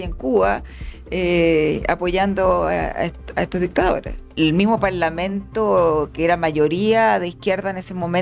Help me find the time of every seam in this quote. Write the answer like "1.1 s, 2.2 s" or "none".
4.3 s